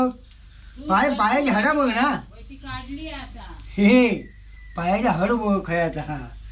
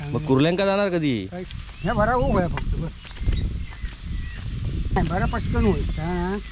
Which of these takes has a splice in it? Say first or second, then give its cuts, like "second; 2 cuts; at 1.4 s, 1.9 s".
second; 1 cut; at 5.0 s